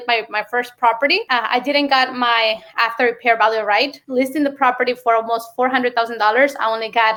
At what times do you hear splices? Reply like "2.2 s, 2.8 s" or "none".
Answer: none